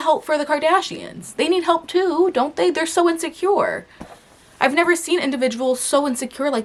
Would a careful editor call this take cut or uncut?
uncut